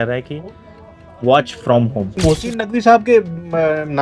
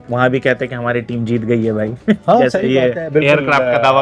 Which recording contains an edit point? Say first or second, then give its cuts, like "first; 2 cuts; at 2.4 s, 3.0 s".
first; 1 cut; at 2.2 s